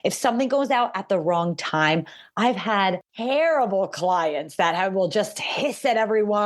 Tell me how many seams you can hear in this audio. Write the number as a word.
one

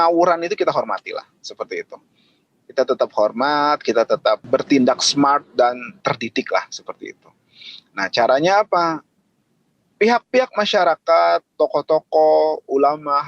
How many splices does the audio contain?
two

